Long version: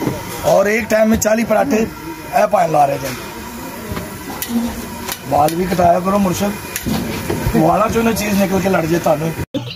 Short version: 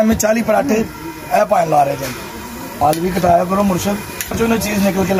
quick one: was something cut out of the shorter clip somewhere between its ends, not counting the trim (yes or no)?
yes